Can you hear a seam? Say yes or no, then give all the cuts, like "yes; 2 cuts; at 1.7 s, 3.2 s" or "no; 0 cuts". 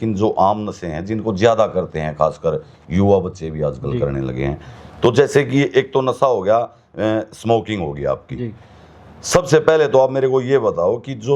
no; 0 cuts